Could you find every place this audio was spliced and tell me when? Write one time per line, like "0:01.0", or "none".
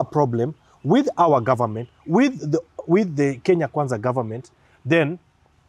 none